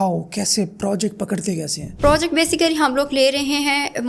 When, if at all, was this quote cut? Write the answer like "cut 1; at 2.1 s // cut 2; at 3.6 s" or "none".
cut 1; at 1.8 s